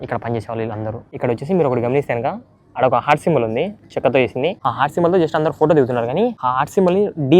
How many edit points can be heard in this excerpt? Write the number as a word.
three